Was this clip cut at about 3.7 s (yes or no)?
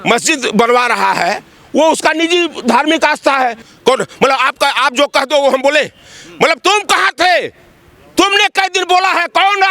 yes